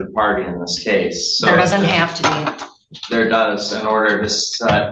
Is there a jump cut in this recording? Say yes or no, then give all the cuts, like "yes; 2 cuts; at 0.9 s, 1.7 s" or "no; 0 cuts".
no; 0 cuts